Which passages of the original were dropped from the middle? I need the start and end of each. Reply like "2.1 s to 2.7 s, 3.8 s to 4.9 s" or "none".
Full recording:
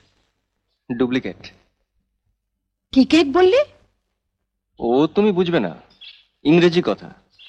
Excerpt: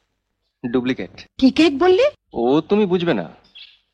1.5 s to 2.7 s, 3.8 s to 4.7 s